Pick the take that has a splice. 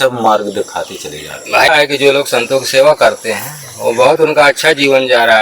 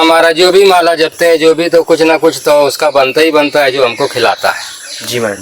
first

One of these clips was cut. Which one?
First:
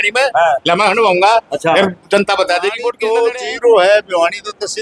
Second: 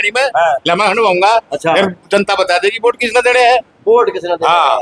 first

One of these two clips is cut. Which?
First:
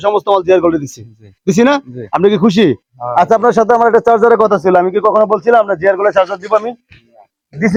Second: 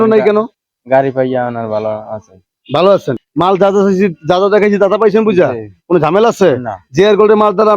second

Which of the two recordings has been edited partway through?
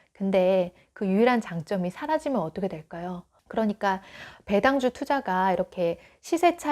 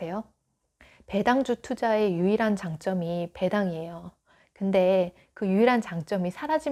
first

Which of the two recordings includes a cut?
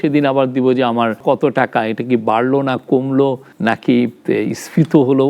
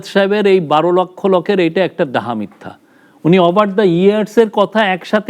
first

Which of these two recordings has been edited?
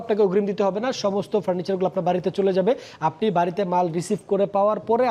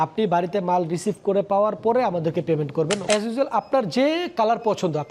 second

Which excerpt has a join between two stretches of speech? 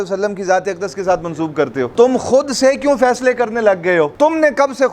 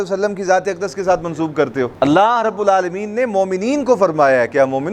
first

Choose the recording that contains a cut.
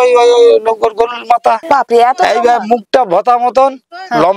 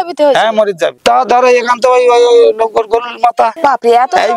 second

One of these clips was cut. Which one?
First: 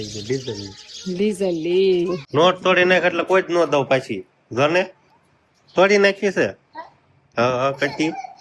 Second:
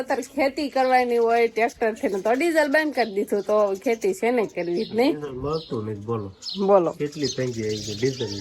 first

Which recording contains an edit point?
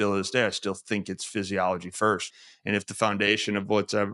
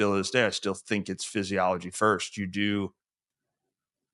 first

